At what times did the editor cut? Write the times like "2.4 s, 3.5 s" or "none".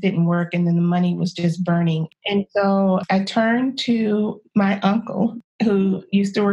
2.1 s, 3.0 s, 4.4 s, 5.4 s